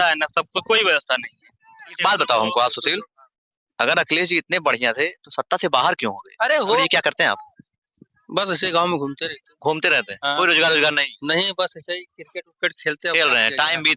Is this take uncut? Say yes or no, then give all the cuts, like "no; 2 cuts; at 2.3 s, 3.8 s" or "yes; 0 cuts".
no; 2 cuts; at 1.9 s, 6.9 s